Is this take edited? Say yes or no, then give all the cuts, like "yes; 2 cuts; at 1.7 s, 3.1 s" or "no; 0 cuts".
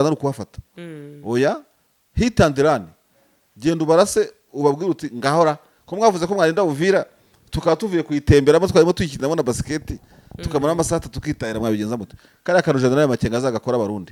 no; 0 cuts